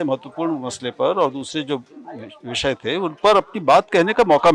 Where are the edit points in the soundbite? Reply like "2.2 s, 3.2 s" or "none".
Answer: none